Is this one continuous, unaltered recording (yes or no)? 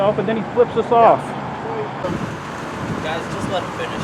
no